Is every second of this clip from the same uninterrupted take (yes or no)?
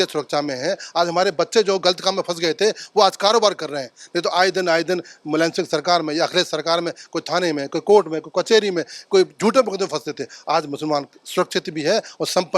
yes